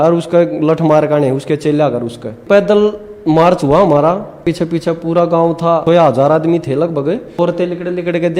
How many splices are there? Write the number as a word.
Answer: four